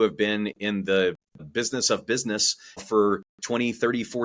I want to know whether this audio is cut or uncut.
cut